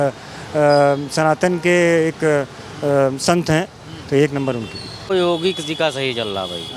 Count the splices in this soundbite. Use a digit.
1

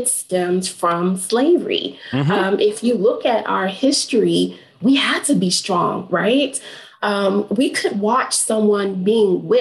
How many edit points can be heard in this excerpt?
0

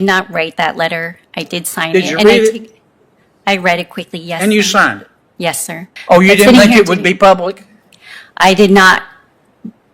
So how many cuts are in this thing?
1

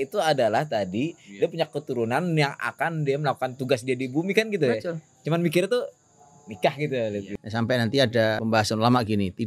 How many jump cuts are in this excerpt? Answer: 2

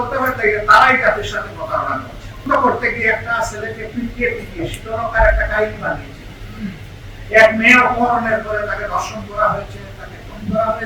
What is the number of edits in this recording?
1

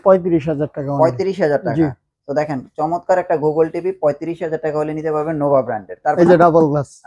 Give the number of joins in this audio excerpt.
1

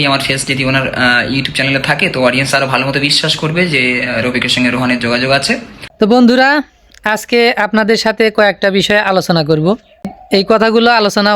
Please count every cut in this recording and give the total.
2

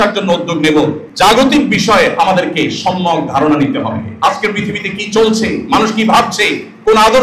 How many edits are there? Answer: 1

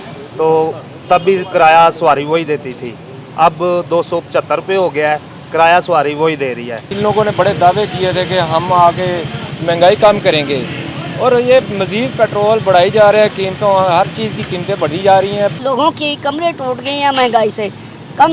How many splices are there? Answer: 2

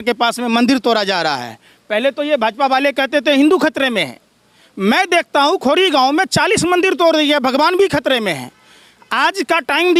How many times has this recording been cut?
0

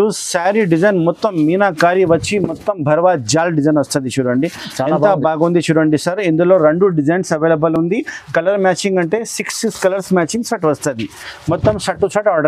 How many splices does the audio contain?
0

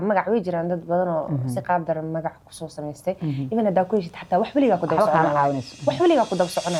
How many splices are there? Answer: 0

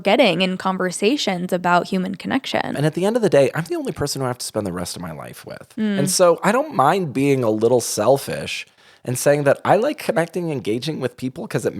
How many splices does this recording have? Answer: 1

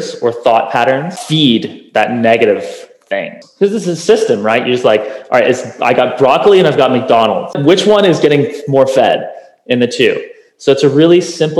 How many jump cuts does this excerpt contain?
3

